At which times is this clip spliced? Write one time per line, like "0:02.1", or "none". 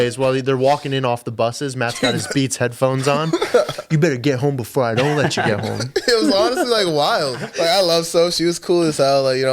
0:07.5